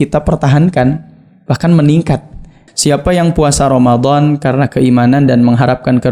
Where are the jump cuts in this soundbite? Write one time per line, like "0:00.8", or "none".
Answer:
0:02.6